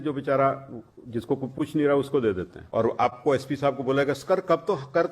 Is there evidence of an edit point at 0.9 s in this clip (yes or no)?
no